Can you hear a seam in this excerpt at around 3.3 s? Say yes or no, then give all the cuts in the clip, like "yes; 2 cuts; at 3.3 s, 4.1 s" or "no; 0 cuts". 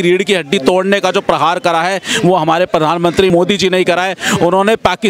yes; 1 cut; at 3.3 s